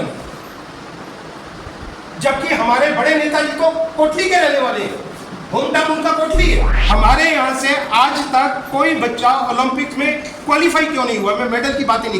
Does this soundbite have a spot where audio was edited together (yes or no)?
yes